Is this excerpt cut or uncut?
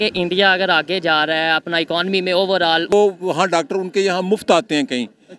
cut